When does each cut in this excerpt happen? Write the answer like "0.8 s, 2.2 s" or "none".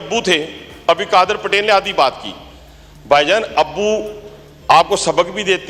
none

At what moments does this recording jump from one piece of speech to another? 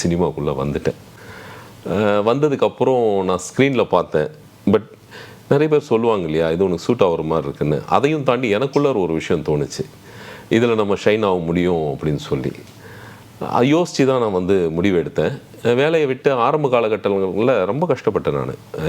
none

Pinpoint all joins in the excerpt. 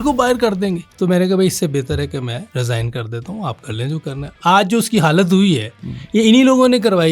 0.9 s, 2.5 s, 4.4 s

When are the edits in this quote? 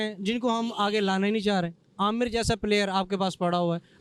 none

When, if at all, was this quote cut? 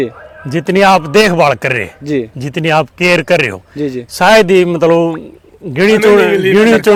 none

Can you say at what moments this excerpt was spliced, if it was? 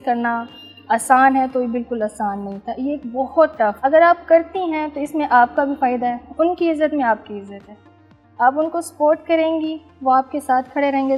none

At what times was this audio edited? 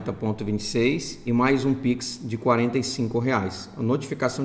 1.1 s

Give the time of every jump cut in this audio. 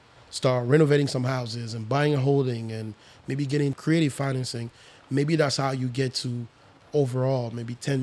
3.8 s

